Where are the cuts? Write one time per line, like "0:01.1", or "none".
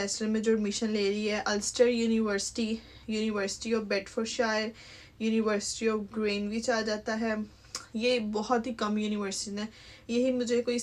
none